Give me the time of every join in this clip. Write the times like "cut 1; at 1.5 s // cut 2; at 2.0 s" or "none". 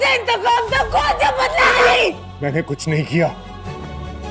cut 1; at 1.7 s

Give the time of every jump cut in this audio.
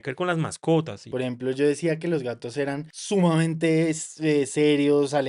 cut 1; at 1.0 s // cut 2; at 2.9 s

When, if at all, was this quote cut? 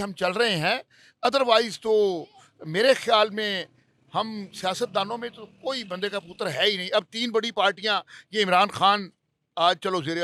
none

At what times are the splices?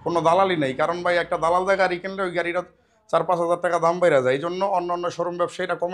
none

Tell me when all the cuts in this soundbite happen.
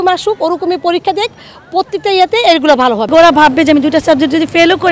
cut 1; at 3.0 s

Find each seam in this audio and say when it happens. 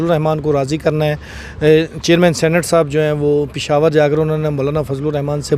none

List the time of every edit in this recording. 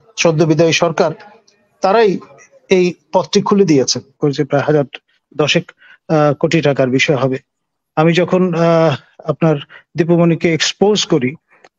cut 1; at 4.1 s

